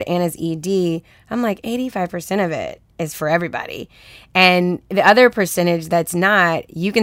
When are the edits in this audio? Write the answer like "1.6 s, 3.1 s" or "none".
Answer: none